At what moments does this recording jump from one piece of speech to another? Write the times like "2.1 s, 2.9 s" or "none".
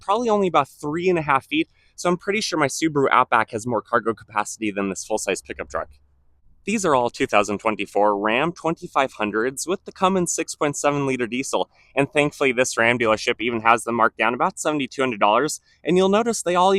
none